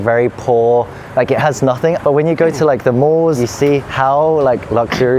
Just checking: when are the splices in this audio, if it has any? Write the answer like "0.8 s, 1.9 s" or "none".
2.0 s, 3.4 s